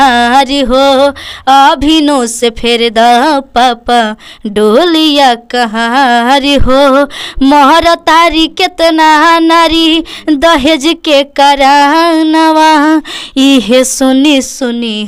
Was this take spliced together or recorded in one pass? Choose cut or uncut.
uncut